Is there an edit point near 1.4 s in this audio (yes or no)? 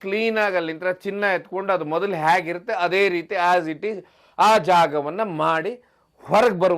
no